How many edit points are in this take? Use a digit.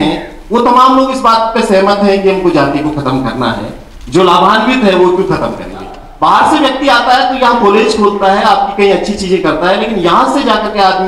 1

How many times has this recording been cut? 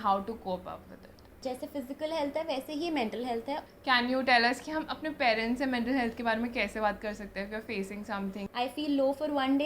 3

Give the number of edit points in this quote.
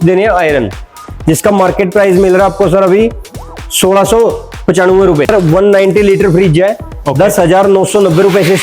1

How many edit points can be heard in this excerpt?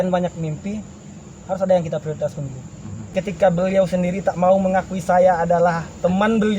1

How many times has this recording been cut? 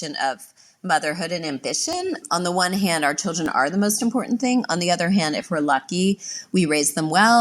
1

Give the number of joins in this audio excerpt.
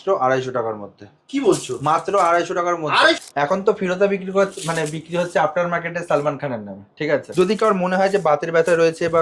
2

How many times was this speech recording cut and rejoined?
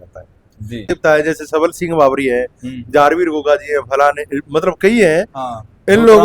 1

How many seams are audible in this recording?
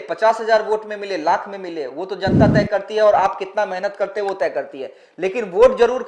0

